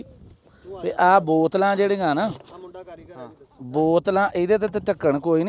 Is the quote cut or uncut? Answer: uncut